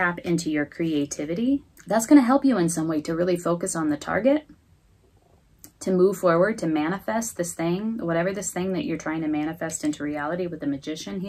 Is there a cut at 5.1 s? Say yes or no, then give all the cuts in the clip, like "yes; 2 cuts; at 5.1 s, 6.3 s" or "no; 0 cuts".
no; 1 cut; at 1.7 s